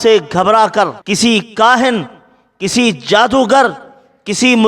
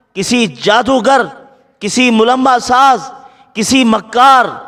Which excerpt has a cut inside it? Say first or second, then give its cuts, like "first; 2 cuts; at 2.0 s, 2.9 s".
first; 1 cut; at 1.0 s